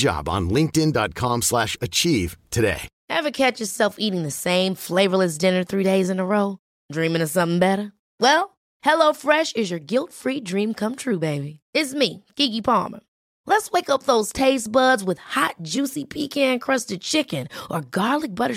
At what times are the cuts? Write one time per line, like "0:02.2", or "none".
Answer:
0:02.9